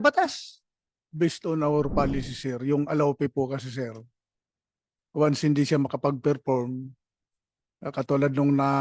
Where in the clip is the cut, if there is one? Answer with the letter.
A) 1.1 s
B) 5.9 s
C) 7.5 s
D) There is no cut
A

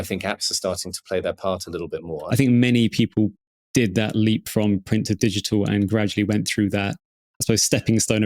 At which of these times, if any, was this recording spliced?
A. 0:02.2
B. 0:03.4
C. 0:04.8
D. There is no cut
A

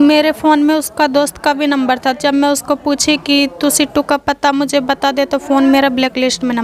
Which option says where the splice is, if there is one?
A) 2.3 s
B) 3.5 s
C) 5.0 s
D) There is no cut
D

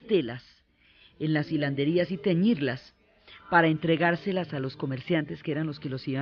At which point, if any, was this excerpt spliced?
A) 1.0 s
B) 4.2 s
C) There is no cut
C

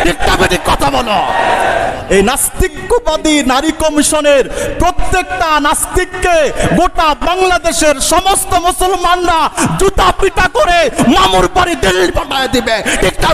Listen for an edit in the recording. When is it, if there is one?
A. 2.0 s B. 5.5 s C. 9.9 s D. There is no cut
A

